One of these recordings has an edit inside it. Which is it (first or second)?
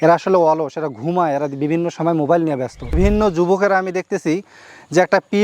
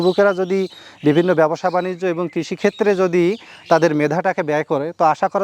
first